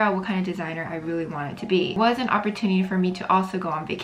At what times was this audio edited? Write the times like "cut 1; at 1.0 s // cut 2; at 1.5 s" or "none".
cut 1; at 2.0 s